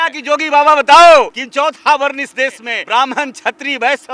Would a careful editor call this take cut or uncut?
cut